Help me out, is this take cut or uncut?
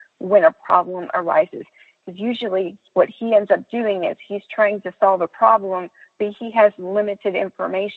cut